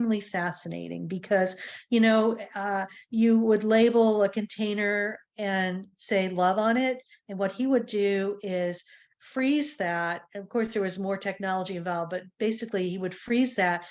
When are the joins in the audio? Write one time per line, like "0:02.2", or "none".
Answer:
none